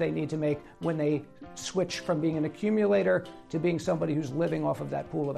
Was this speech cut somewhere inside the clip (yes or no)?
no